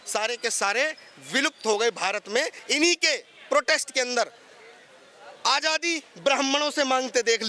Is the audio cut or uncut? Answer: cut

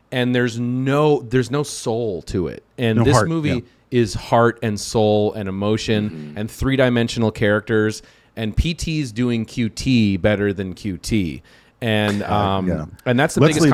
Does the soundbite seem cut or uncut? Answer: uncut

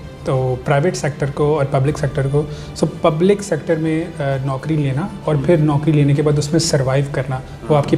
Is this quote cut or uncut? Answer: uncut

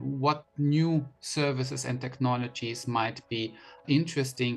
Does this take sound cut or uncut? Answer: uncut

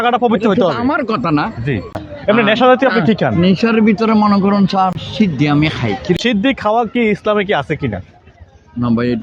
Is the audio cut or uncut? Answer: cut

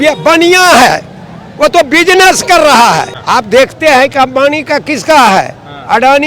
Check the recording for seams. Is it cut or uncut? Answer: cut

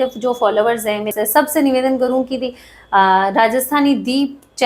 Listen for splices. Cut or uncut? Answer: cut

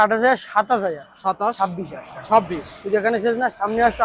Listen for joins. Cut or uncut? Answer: uncut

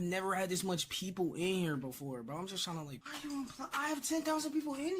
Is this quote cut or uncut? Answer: cut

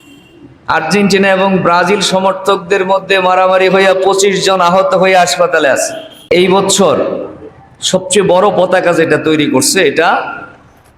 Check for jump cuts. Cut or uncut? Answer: cut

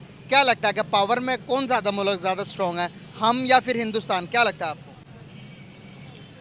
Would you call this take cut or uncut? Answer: uncut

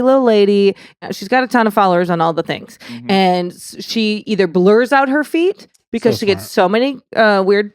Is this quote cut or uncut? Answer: cut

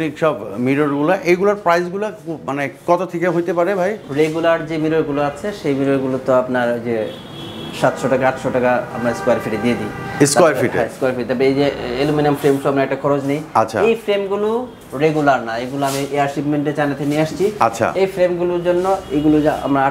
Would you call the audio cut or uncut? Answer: uncut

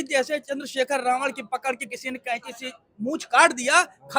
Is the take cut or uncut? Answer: uncut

